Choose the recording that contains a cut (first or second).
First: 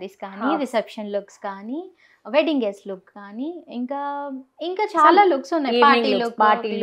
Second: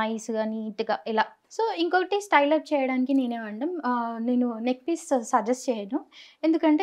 second